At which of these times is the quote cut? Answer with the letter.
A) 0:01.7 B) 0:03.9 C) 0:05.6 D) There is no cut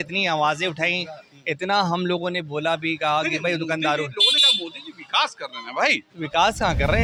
D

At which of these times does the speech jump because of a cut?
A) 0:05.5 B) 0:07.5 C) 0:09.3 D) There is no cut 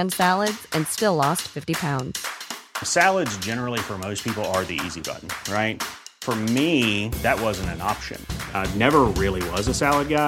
D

